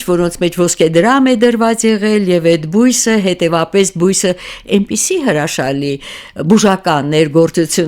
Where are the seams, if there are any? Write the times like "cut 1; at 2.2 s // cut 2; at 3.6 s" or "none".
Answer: none